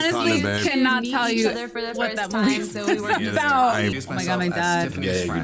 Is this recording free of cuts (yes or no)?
no